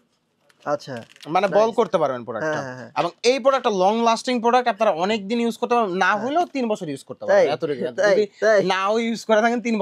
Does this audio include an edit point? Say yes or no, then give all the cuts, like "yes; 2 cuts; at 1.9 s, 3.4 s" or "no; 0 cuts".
no; 0 cuts